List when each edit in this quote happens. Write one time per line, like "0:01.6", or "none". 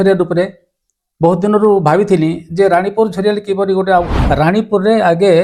0:04.2